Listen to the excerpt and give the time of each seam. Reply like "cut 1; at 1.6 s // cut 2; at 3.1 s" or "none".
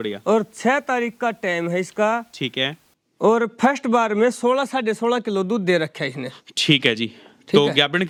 none